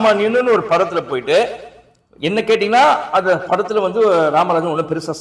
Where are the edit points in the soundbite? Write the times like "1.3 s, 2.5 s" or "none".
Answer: none